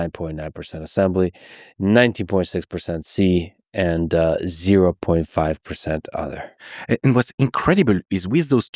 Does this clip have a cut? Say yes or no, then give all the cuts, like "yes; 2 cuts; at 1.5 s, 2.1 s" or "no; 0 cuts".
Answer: no; 0 cuts